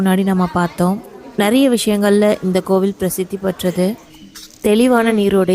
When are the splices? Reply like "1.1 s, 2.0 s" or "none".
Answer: 4.0 s